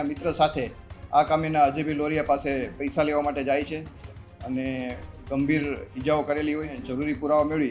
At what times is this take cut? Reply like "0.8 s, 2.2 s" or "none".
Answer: 4.0 s, 6.8 s